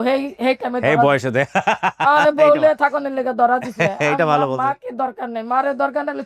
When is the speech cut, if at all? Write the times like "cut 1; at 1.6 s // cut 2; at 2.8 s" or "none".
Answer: none